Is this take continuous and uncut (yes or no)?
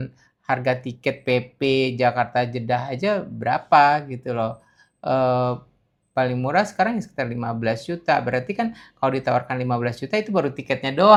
yes